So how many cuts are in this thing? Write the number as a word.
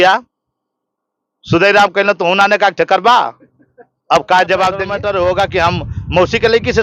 one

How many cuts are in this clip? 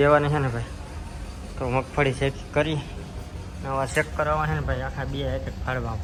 zero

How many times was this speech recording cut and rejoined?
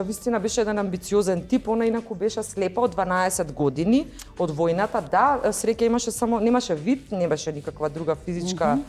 zero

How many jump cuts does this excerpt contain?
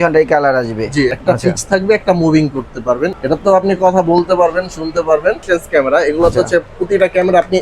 three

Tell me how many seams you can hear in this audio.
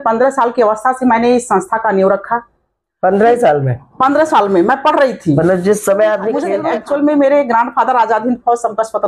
one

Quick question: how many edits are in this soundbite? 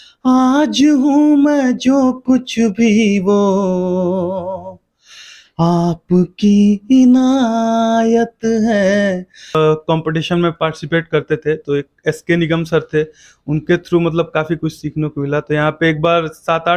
one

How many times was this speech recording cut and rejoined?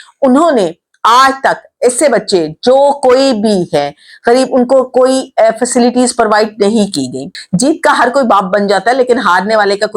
one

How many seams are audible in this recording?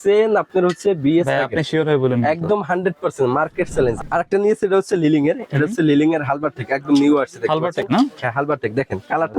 one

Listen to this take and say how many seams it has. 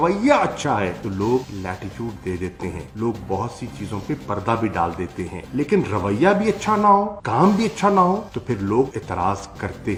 zero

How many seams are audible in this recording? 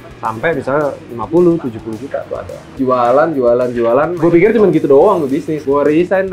one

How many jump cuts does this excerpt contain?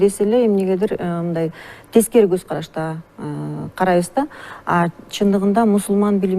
zero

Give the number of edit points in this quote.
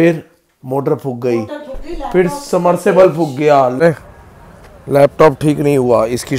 one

